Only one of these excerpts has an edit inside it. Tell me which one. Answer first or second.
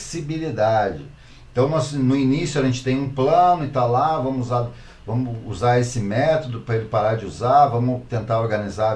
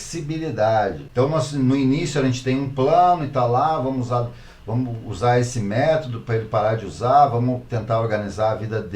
second